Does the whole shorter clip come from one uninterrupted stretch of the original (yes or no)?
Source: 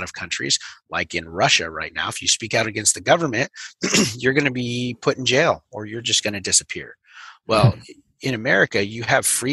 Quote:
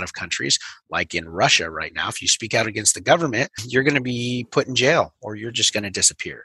no